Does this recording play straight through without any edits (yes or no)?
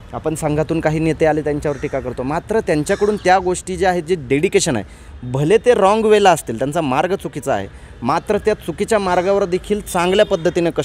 yes